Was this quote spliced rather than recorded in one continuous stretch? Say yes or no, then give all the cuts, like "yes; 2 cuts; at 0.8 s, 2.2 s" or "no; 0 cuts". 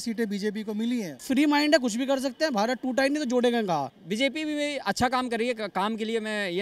yes; 2 cuts; at 1.2 s, 4.0 s